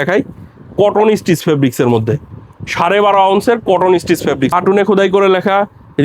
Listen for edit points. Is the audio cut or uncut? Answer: cut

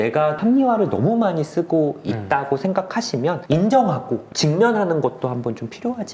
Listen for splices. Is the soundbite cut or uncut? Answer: uncut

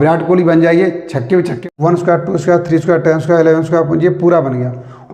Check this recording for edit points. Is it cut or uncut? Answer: cut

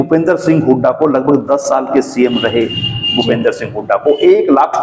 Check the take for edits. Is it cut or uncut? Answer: uncut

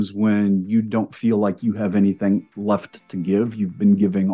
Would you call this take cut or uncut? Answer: uncut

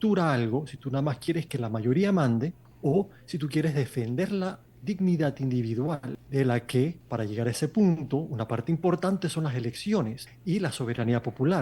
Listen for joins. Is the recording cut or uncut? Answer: cut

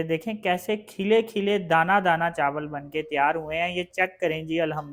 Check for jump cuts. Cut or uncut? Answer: uncut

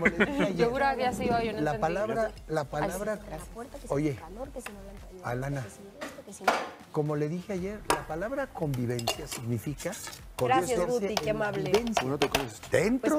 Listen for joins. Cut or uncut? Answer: uncut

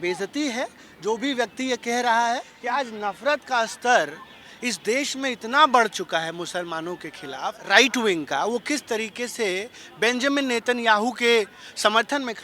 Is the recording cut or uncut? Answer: cut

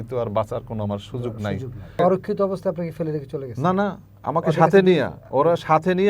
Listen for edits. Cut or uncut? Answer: cut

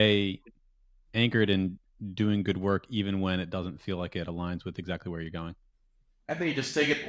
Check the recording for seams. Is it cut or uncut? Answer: uncut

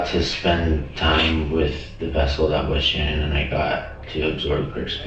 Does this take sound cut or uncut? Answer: uncut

